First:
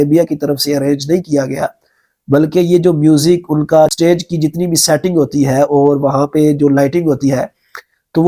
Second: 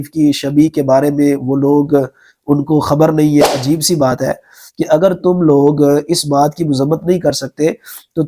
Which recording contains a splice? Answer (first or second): second